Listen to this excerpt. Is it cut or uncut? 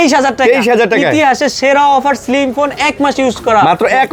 uncut